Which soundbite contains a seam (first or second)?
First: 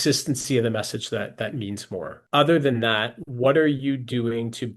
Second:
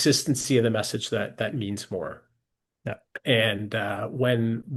first